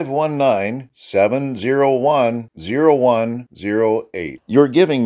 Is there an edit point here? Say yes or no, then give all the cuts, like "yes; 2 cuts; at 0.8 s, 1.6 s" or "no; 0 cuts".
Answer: no; 0 cuts